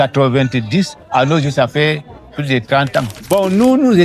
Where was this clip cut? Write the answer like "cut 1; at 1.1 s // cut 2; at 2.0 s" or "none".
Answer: cut 1; at 3.1 s